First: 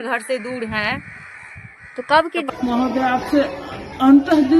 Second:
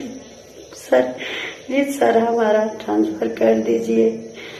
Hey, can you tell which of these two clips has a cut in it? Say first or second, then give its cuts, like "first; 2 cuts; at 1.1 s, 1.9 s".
first; 1 cut; at 2.4 s